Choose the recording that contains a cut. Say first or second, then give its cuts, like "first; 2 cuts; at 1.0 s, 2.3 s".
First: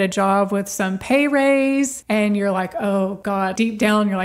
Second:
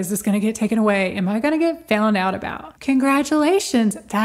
first; 2 cuts; at 2.0 s, 3.3 s